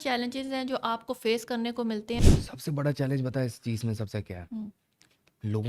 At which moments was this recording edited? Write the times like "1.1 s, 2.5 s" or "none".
2.2 s

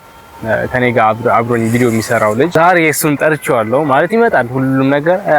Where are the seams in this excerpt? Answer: 2.5 s

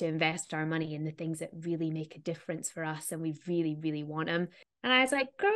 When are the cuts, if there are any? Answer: 4.6 s

